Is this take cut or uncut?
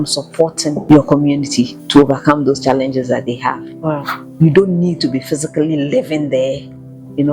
cut